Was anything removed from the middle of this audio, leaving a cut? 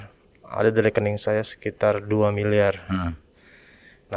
no; 0 cuts

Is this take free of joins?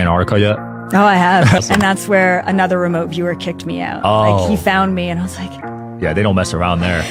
yes; 0 cuts

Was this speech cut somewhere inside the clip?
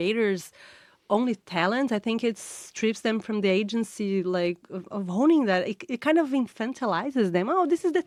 no; 0 cuts

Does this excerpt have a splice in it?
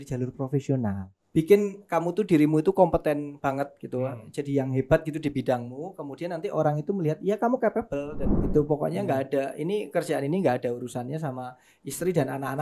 yes; 2 cuts; at 1.1 s, 8.5 s

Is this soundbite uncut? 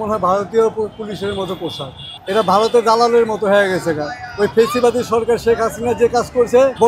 yes; 0 cuts

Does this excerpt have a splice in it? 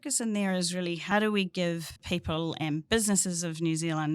yes; 2 cuts; at 1.0 s, 2.0 s

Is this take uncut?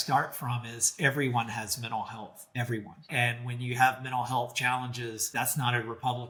yes; 0 cuts

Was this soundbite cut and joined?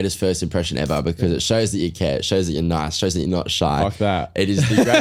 no; 0 cuts

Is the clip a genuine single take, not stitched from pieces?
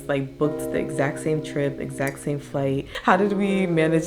no; 1 cut; at 2.9 s

